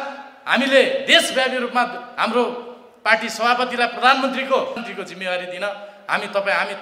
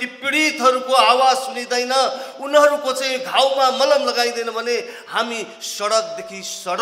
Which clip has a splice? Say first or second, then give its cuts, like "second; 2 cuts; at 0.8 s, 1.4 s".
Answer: first; 1 cut; at 4.8 s